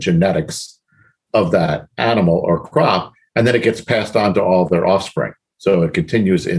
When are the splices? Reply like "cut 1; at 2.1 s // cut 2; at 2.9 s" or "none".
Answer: none